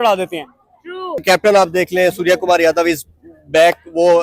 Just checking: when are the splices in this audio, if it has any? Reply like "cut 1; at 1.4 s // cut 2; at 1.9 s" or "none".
cut 1; at 1.2 s